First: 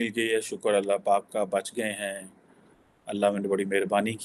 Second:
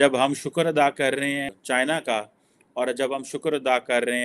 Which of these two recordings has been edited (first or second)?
second